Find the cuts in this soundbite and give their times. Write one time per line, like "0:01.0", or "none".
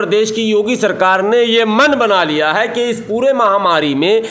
none

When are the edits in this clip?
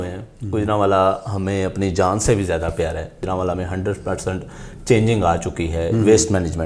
0:03.2

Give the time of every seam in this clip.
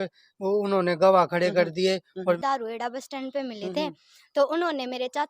0:02.1

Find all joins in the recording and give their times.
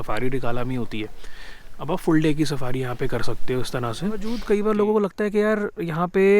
0:04.3

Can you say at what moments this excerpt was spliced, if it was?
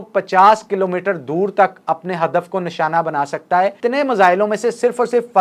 0:03.8

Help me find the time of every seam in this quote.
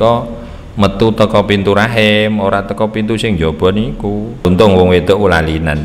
0:04.4

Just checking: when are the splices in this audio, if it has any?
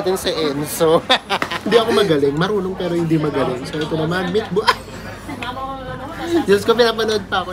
0:01.7

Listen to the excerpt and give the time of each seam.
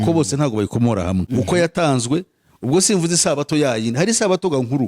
0:01.3

